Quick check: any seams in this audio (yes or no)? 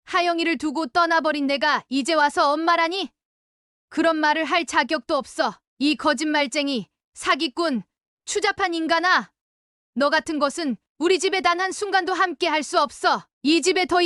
no